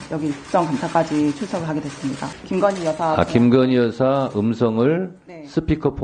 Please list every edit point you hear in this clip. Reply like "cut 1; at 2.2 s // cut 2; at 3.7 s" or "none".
cut 1; at 2.3 s